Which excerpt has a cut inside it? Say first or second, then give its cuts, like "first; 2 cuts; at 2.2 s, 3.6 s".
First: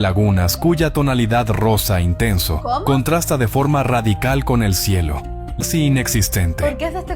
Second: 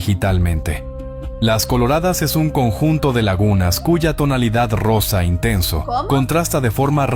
first; 1 cut; at 5.6 s